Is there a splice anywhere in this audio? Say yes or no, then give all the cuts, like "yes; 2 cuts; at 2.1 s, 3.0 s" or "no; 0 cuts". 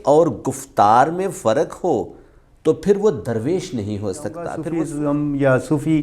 yes; 1 cut; at 4.6 s